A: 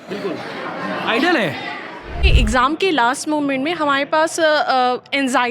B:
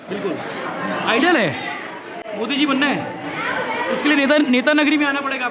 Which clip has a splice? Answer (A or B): A